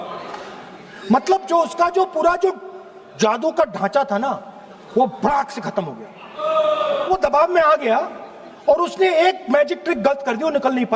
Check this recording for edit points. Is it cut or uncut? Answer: cut